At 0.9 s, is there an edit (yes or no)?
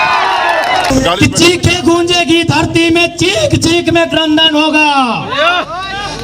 yes